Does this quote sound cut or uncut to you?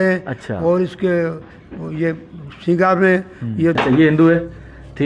cut